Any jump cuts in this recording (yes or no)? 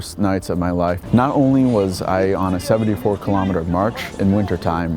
yes